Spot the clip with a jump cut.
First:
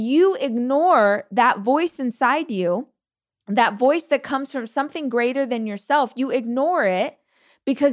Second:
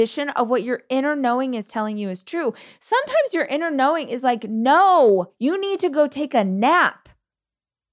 second; 1 cut; at 5.3 s

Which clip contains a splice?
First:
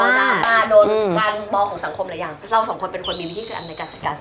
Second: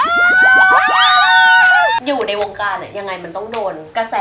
second; 1 cut; at 2.0 s

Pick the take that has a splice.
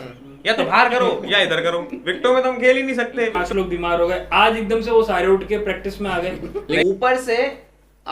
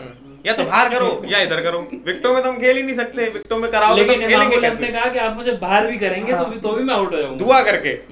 first; 2 cuts; at 3.4 s, 6.8 s

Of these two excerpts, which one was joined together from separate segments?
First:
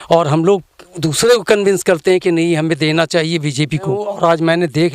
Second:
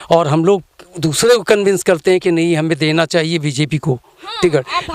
first; 1 cut; at 4.0 s

